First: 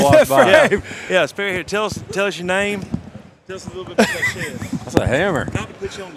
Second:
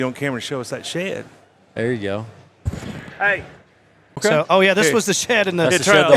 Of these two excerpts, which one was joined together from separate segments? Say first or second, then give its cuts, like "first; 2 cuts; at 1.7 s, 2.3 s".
second; 1 cut; at 4.2 s